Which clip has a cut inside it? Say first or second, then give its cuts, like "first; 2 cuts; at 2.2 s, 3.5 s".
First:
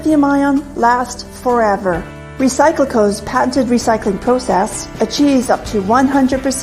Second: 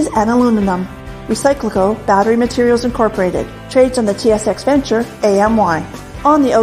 first; 1 cut; at 1.0 s